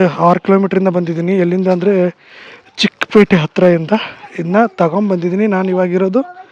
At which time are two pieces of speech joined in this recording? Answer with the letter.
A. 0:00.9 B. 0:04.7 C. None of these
C